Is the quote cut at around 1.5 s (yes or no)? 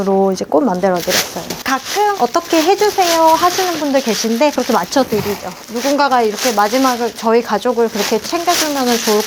yes